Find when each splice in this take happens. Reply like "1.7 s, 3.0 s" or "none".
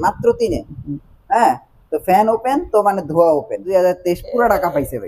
3.6 s